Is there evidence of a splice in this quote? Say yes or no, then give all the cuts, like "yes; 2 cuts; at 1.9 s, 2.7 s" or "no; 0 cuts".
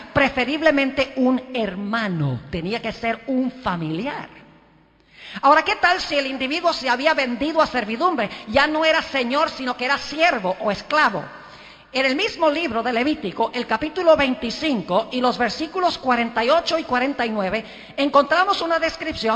no; 0 cuts